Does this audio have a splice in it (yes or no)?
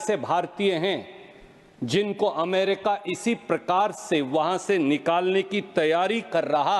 no